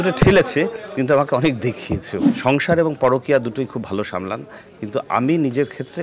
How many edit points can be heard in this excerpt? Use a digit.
1